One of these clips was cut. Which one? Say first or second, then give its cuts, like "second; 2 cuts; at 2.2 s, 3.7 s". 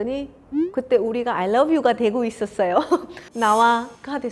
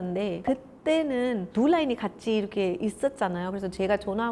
first; 1 cut; at 3.2 s